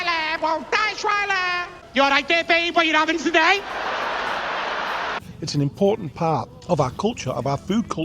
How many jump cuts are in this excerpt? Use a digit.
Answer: 3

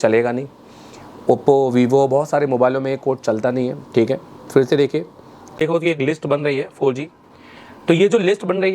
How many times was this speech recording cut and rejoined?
1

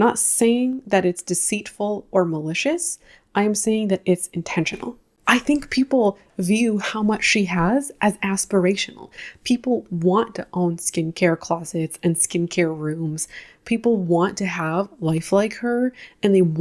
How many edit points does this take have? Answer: 1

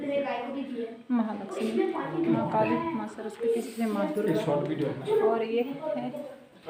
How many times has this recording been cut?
0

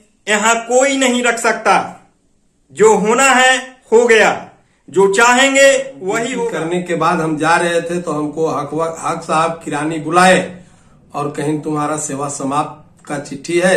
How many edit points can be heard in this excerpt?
1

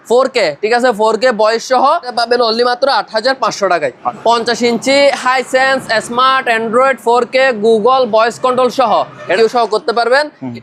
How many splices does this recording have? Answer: 3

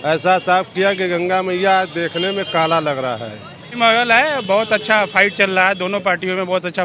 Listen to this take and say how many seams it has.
1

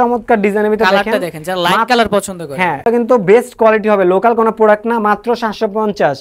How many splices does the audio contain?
1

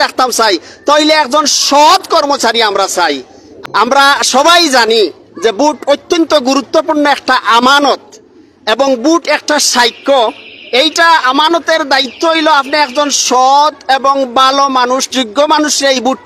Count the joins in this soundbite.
1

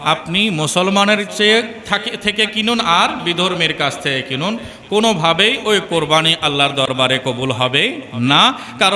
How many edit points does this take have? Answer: 0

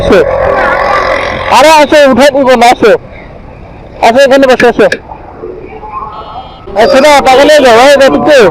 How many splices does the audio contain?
1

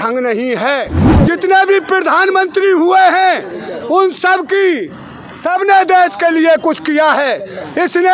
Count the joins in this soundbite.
1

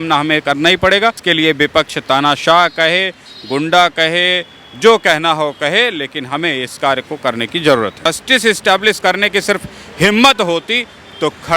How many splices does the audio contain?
2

